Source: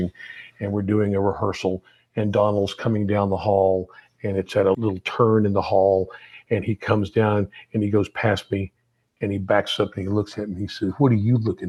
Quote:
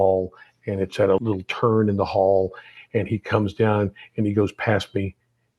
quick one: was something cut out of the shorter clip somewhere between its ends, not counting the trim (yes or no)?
no